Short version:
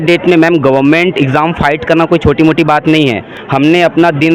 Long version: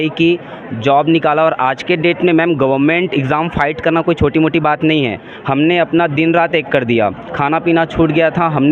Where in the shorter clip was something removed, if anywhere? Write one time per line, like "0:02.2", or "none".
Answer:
none